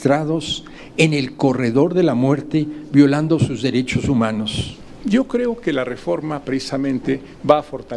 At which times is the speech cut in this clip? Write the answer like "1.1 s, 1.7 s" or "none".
4.6 s

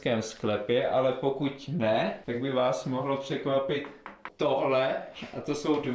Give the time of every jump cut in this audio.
none

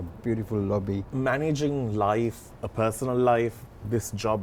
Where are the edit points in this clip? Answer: 1.1 s

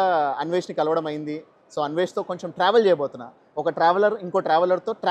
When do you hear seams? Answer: none

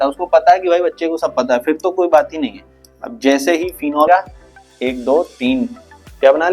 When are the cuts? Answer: 4.1 s

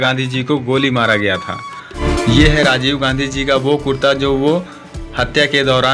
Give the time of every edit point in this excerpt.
2.0 s

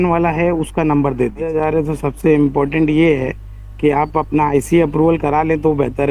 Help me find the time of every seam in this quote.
1.5 s

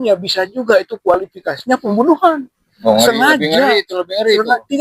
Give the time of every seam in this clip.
2.8 s

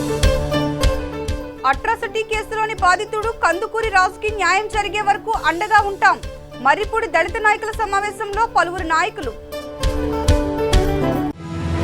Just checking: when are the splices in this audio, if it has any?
1.2 s

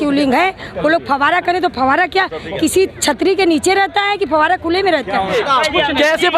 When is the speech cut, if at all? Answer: 5.3 s

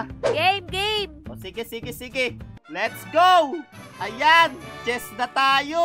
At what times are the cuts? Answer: 2.5 s

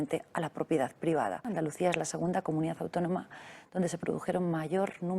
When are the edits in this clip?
1.5 s

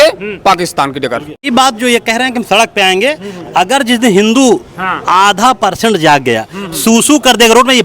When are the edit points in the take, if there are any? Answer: 1.5 s

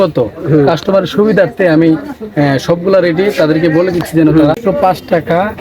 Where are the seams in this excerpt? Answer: 4.6 s

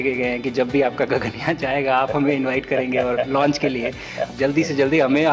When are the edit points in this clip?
4.3 s

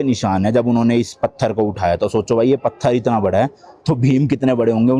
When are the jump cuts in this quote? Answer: none

